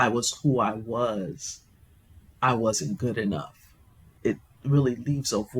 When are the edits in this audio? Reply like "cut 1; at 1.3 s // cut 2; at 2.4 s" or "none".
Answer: cut 1; at 4.2 s